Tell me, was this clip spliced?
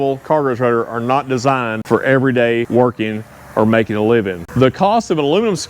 yes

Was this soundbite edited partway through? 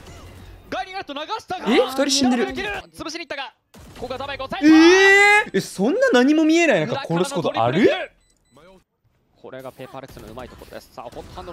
yes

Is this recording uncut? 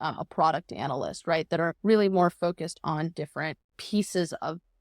no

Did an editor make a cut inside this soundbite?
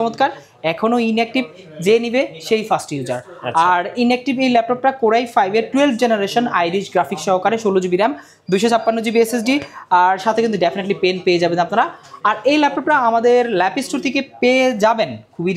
no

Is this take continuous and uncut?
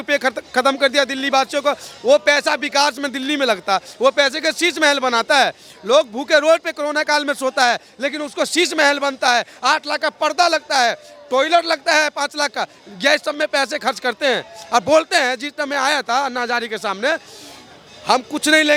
yes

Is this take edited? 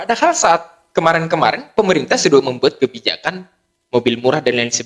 no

